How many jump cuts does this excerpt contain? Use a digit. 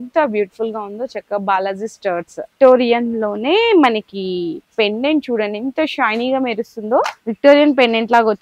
2